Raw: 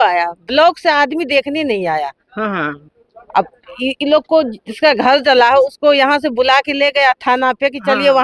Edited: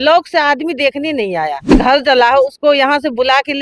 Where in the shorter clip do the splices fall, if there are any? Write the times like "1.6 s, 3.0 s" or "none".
1.8 s